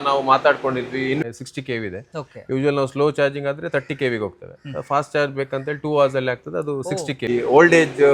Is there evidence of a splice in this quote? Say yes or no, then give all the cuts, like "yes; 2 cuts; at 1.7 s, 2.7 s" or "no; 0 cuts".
yes; 2 cuts; at 1.2 s, 7.3 s